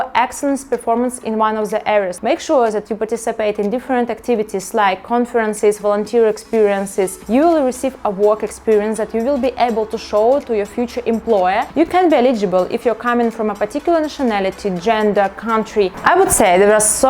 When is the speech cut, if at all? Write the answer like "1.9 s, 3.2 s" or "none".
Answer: 2.1 s, 7.2 s, 11.7 s, 15.9 s